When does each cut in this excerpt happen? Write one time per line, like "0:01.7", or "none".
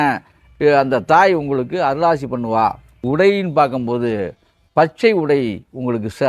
0:03.0